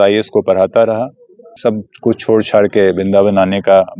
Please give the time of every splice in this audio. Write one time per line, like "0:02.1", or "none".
0:01.5

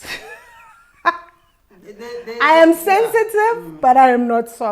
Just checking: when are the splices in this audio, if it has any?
none

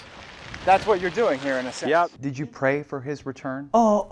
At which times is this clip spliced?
0:02.2

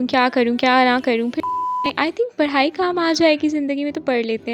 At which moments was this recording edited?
0:01.8

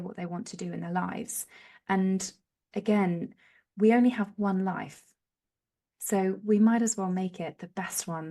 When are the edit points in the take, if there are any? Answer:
none

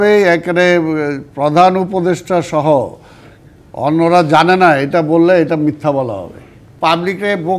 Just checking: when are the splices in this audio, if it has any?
0:06.6

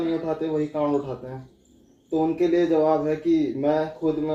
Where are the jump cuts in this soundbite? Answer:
none

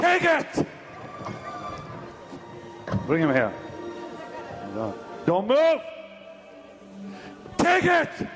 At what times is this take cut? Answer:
0:01.9

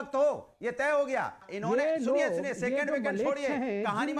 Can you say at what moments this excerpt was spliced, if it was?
0:01.4

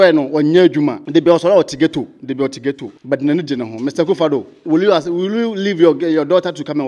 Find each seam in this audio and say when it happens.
0:01.0
0:02.9

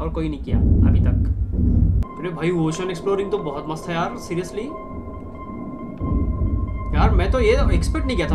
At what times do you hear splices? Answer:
0:02.1

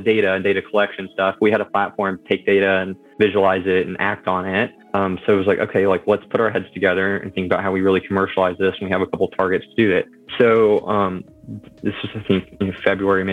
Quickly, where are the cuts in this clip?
0:03.0
0:04.8
0:10.2

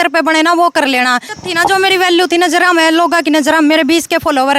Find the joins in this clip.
0:01.3

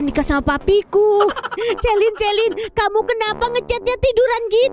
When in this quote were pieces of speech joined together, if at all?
0:01.6

